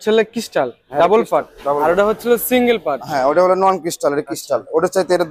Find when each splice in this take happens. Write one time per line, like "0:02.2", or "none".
none